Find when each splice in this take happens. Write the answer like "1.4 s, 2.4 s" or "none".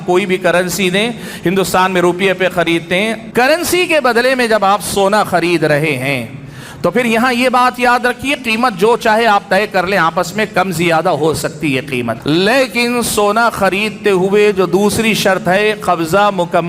3.2 s, 12.2 s